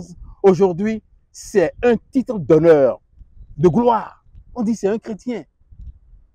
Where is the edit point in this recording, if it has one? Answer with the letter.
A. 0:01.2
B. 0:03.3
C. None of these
C